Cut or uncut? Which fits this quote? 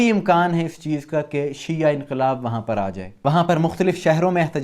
cut